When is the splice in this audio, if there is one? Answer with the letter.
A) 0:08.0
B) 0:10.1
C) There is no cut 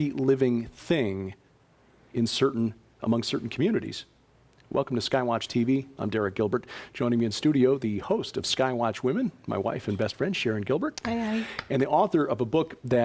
B